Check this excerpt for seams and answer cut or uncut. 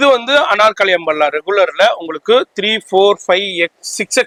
uncut